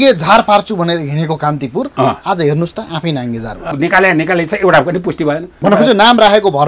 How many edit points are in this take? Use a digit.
2